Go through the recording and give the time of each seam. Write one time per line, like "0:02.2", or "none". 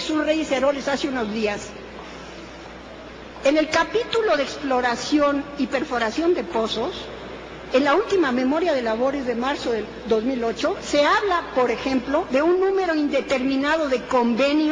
none